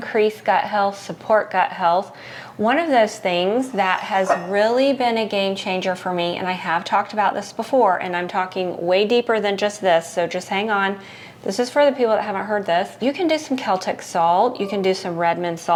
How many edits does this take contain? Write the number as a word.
zero